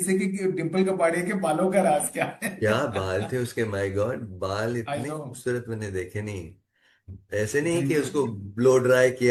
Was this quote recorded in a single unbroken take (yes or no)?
yes